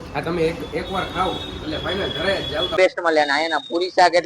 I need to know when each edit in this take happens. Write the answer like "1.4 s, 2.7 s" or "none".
2.8 s